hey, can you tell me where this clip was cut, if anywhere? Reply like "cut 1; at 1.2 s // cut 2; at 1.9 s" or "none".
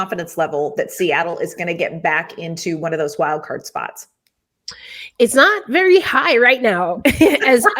none